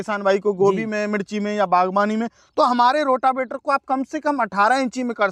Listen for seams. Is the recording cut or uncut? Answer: uncut